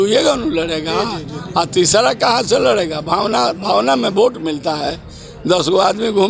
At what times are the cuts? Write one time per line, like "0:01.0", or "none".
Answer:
none